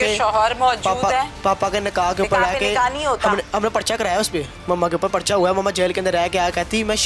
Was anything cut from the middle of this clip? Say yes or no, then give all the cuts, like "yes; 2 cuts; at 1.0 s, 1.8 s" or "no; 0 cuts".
no; 0 cuts